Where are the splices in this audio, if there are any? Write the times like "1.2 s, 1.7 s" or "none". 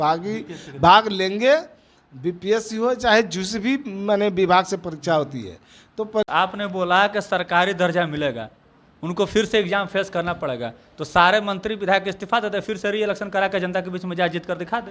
6.2 s

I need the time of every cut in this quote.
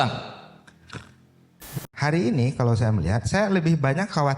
1.8 s

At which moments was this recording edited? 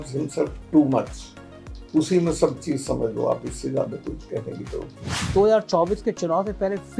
5.2 s

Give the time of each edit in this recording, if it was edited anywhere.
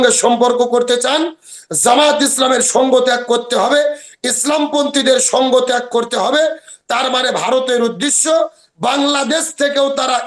none

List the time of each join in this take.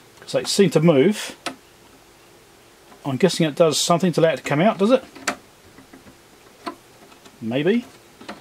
none

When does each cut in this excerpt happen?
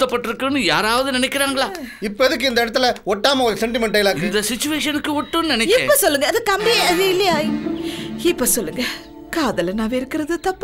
none

